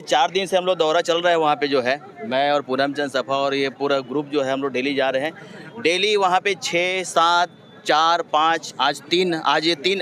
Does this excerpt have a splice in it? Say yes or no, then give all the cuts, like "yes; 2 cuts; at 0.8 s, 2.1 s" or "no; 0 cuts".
no; 0 cuts